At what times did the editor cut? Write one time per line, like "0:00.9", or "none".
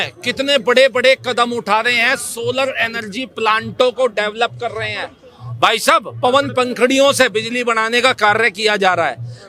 none